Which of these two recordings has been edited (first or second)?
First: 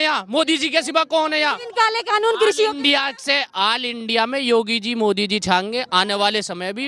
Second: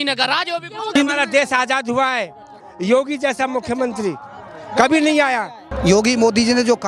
second